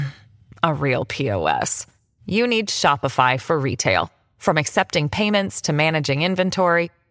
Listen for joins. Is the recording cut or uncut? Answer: uncut